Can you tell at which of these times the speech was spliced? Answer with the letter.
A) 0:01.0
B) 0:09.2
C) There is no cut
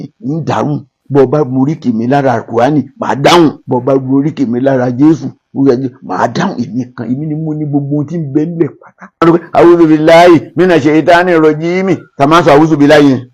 B